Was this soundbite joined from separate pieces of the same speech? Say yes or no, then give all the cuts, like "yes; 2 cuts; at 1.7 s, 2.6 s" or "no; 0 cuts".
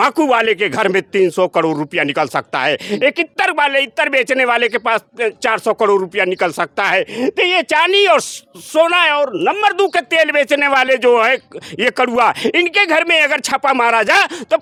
no; 0 cuts